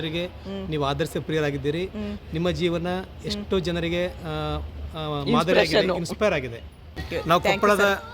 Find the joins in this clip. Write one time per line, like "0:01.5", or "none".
0:07.1

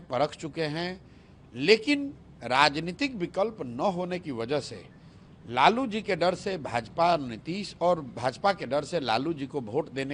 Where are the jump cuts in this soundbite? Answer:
none

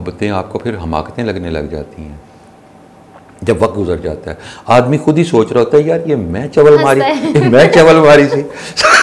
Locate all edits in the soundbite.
none

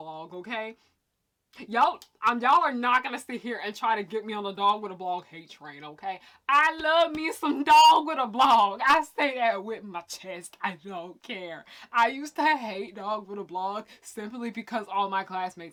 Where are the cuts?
none

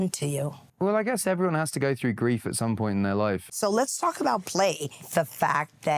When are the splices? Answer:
0:03.5
0:05.0

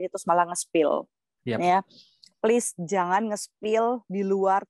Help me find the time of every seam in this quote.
none

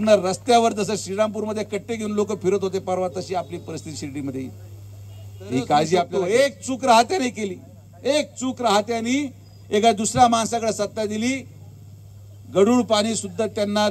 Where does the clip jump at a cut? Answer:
0:06.1

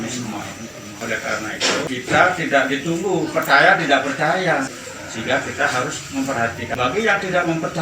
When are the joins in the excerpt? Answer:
0:00.9
0:01.9
0:04.9
0:06.7

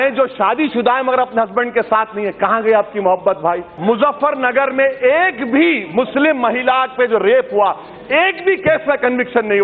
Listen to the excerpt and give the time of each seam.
0:03.7

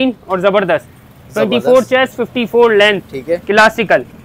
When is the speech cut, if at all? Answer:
none

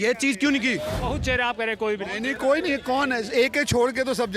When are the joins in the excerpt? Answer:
0:01.0

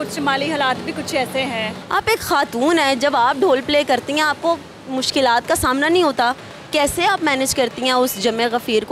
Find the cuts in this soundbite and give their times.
0:01.7

